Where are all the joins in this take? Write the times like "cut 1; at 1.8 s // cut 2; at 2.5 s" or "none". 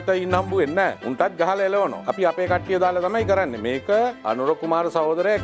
cut 1; at 1.0 s // cut 2; at 2.0 s // cut 3; at 4.2 s